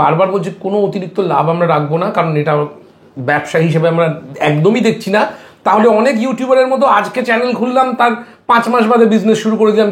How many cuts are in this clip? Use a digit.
0